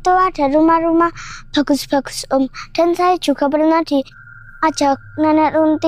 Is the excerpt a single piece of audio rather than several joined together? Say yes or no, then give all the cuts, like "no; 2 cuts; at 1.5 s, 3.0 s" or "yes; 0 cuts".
yes; 0 cuts